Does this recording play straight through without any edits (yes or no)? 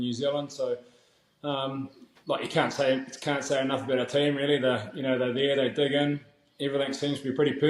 yes